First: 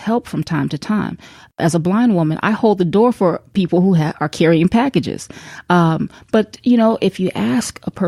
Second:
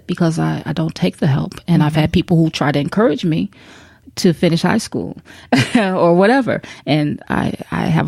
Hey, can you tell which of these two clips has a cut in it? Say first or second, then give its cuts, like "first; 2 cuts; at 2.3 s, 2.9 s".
first; 2 cuts; at 1.6 s, 3.4 s